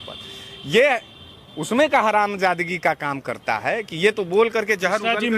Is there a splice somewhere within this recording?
no; 0 cuts

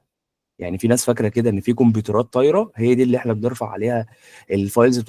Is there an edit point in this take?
no; 0 cuts

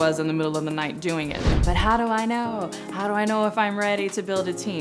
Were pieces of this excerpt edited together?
yes; 1 cut; at 1.5 s

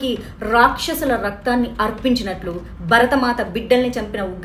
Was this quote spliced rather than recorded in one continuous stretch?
no; 0 cuts

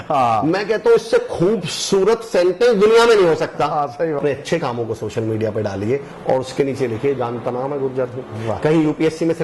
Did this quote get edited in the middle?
yes; 1 cut; at 4.2 s

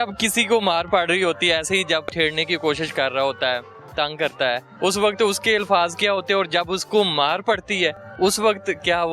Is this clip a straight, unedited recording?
no; 2 cuts; at 2.1 s, 4.7 s

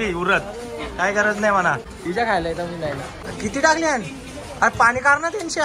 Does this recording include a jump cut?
yes; 2 cuts; at 1.9 s, 3.2 s

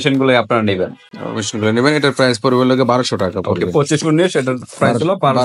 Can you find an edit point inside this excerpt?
no; 0 cuts

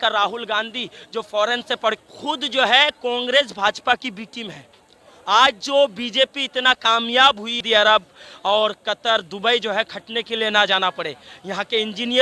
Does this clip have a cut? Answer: yes; 2 cuts; at 2.0 s, 7.6 s

